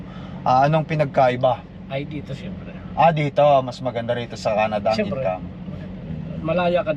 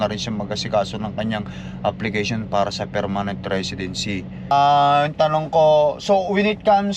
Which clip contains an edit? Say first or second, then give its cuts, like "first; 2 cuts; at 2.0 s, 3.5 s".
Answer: second; 1 cut; at 4.5 s